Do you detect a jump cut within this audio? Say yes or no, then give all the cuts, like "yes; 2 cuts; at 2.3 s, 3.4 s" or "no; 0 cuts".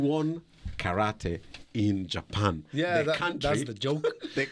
no; 0 cuts